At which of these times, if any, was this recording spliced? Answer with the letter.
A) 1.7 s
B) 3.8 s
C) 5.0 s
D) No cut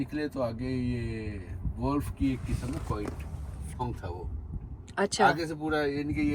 B